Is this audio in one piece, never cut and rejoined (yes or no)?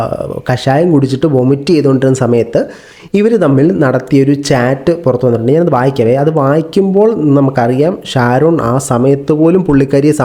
yes